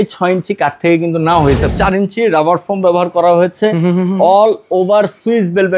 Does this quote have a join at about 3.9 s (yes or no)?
no